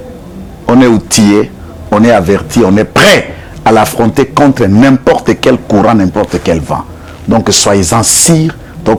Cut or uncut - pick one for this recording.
uncut